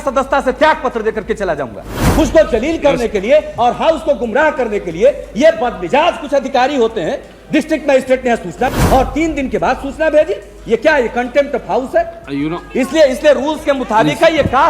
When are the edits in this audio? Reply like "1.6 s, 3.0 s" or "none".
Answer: 2.0 s, 8.7 s